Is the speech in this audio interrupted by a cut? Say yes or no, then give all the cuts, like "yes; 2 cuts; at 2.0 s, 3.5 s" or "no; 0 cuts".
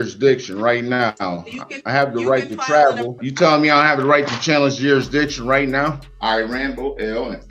yes; 2 cuts; at 3.2 s, 6.1 s